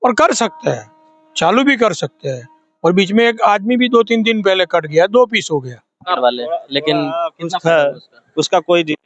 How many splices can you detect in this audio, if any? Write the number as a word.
one